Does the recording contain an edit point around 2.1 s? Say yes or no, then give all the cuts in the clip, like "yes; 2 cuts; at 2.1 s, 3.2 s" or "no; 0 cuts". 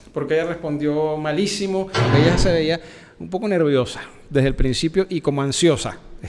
yes; 1 cut; at 2.1 s